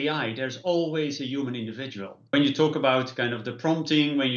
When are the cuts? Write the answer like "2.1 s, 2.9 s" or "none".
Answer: 2.3 s